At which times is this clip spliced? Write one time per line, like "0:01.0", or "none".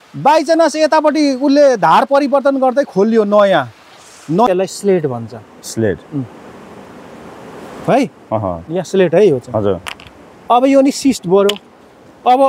0:04.5